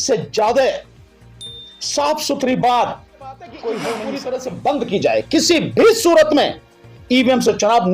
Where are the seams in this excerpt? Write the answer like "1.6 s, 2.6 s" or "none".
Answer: 4.1 s